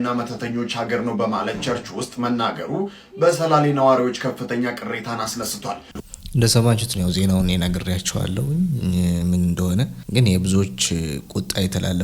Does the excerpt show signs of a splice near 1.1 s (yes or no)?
no